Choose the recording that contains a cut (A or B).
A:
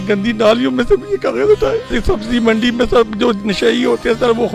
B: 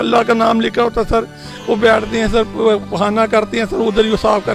A